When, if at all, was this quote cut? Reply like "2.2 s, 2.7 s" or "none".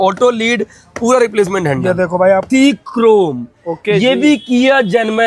2.4 s